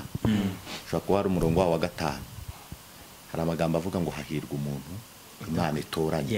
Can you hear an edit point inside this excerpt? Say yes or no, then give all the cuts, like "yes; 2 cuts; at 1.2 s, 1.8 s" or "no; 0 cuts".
no; 0 cuts